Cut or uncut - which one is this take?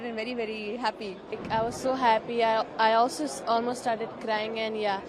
cut